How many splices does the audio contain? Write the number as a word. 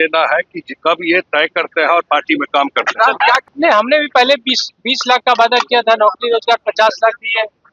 one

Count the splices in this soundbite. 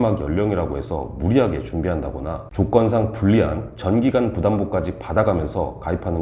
one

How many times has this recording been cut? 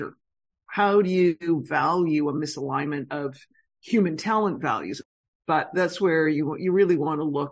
one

